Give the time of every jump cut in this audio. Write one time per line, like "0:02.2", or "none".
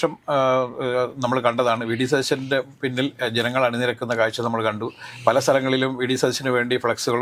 none

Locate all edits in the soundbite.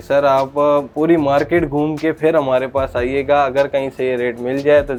none

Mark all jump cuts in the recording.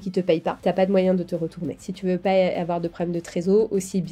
0:01.8

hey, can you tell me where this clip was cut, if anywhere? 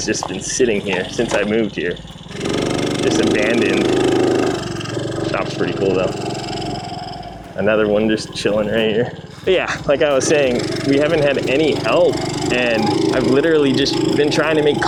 none

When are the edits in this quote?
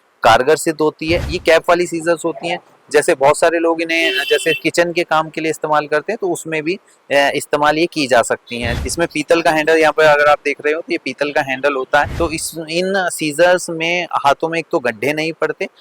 0:01.3
0:08.6
0:12.1

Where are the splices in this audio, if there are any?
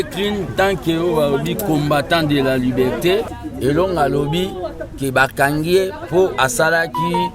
0:03.4

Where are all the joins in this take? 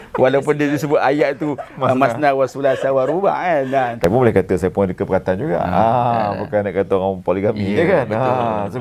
0:04.0

